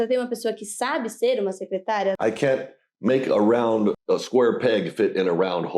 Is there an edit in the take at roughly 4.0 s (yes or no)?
yes